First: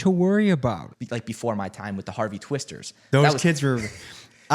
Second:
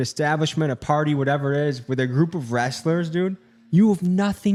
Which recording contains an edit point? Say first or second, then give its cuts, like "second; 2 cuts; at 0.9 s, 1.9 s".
first; 1 cut; at 0.9 s